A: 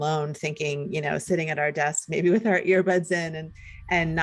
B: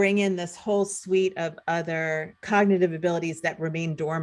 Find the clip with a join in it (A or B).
B